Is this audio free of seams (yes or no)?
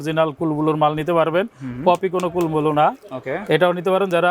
yes